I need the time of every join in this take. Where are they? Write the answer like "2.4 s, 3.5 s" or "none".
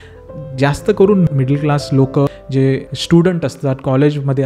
1.3 s, 2.6 s